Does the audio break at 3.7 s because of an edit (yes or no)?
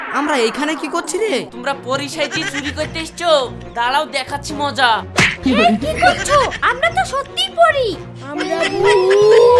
no